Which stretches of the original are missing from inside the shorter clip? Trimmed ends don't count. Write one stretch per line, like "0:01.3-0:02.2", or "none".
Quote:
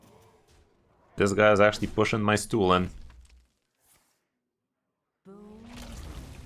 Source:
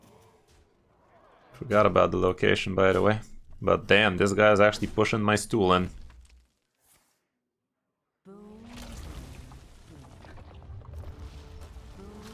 0:01.1-0:04.1